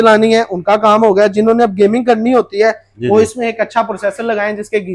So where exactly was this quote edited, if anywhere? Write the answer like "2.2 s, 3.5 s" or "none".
none

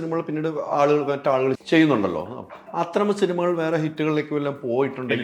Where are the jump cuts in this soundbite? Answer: 1.6 s

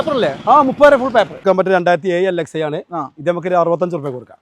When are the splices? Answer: 1.4 s

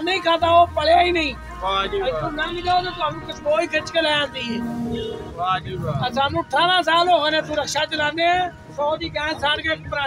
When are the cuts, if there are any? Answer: none

